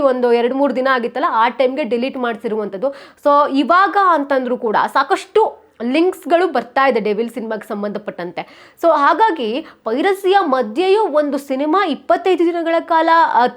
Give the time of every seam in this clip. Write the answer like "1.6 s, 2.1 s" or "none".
none